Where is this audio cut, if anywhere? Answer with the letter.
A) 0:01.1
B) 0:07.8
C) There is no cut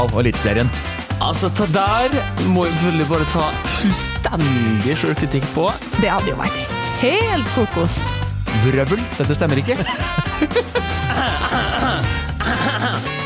C